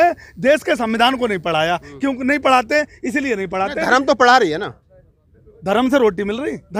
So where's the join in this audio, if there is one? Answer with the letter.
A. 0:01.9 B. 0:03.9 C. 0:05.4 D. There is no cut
D